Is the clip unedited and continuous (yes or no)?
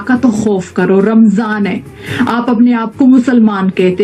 yes